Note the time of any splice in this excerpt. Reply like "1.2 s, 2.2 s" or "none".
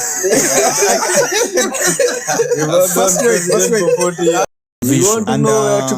4.5 s